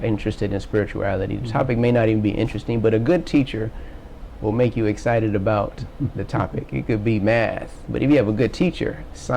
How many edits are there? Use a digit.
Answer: 0